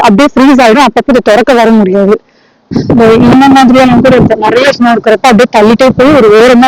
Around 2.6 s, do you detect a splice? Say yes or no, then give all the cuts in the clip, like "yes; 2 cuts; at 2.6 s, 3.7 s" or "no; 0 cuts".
yes; 1 cut; at 2.6 s